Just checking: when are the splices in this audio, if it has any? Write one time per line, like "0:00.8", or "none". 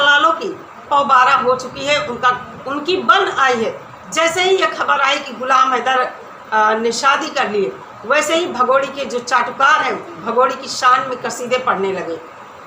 none